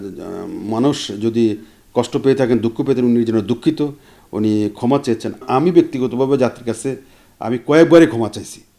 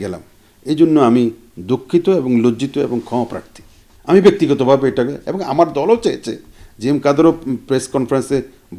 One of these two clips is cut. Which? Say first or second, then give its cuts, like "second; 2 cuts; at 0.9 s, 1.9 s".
first; 1 cut; at 5.4 s